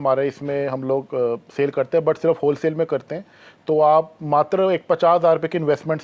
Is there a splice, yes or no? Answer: no